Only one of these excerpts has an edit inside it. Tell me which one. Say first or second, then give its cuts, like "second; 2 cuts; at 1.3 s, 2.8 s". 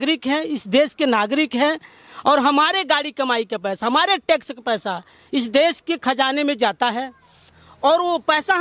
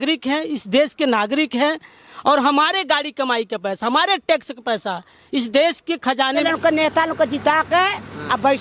second; 1 cut; at 6.4 s